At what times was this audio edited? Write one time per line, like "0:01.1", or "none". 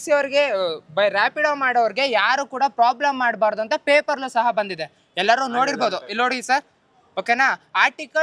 none